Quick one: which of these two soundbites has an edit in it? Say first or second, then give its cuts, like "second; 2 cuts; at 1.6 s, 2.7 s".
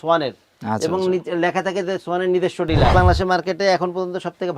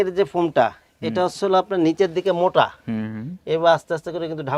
first; 1 cut; at 2.9 s